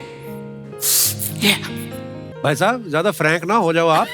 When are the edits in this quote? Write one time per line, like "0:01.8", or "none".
0:02.3